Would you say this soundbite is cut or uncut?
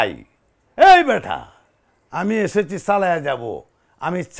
uncut